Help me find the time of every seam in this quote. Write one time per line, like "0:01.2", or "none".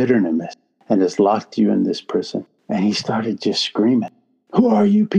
0:02.5